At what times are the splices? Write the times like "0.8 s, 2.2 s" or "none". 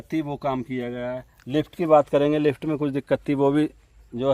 none